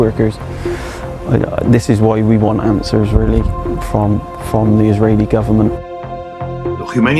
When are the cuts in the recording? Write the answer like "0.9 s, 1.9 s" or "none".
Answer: none